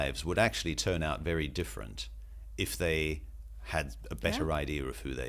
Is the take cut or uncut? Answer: uncut